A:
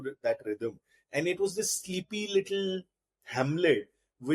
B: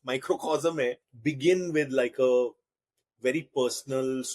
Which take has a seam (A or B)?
B